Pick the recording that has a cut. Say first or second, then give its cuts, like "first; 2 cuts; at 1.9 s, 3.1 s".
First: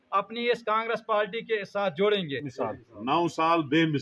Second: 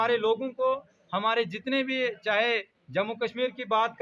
first; 1 cut; at 2.5 s